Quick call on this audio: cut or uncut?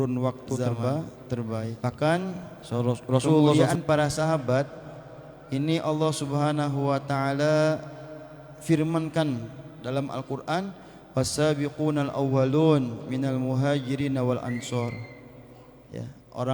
cut